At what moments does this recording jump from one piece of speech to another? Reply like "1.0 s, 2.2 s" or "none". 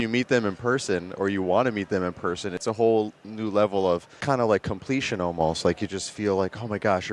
2.6 s, 4.2 s